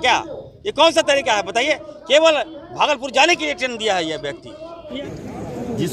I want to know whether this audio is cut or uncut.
cut